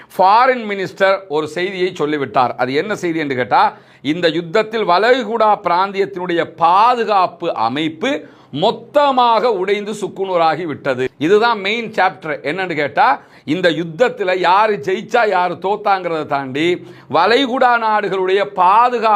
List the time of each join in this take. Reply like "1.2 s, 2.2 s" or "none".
none